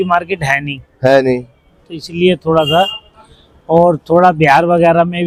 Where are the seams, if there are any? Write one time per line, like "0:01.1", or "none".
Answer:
none